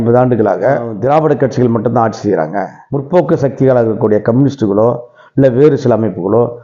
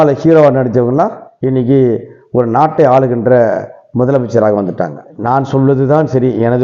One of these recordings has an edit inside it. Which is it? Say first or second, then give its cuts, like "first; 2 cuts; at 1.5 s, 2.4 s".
second; 1 cut; at 5.1 s